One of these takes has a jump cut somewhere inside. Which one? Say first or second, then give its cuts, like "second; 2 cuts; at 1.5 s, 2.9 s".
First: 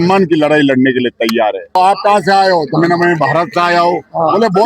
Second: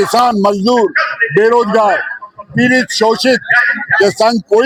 first; 1 cut; at 1.8 s